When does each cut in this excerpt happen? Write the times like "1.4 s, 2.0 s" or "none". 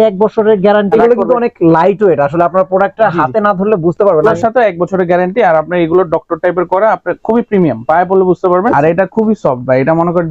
0.9 s, 4.2 s, 8.7 s

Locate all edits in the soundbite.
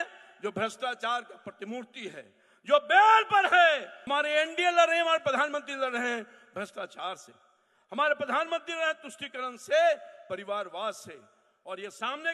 3.9 s

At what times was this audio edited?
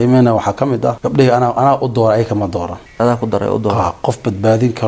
1.0 s, 2.8 s

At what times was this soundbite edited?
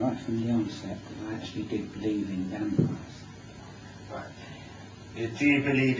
none

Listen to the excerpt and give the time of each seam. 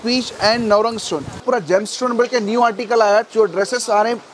1.4 s, 3.3 s

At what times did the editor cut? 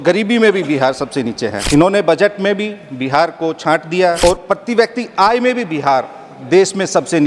1.6 s, 4.2 s

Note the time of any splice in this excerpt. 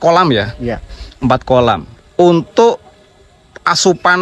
none

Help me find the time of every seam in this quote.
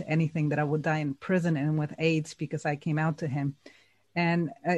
none

